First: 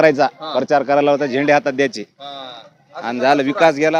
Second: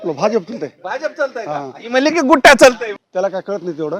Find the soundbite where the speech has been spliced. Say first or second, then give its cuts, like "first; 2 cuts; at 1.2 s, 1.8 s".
second; 1 cut; at 2.9 s